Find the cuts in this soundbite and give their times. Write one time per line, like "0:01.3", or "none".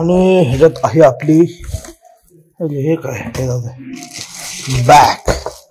none